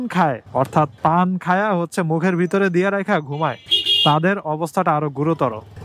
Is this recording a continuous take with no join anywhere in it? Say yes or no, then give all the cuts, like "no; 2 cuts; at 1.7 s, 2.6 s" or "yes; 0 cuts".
yes; 0 cuts